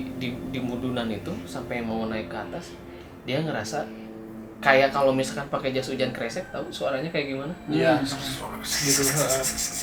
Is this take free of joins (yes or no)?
yes